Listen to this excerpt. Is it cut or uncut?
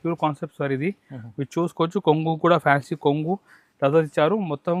uncut